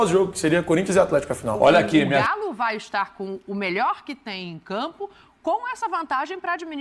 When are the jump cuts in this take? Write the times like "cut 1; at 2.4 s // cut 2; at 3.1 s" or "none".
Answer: cut 1; at 2.1 s